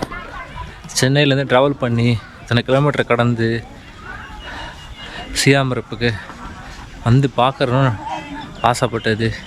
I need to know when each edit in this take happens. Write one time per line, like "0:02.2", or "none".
none